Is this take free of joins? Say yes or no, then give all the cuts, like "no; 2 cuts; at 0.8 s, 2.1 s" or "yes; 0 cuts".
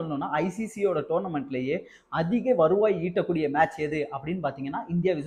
yes; 0 cuts